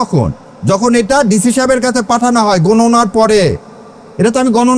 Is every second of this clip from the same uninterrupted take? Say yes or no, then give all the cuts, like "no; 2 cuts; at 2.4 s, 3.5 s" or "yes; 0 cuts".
yes; 0 cuts